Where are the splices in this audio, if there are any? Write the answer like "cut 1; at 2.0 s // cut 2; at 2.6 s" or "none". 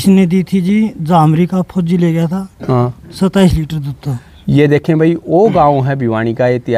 none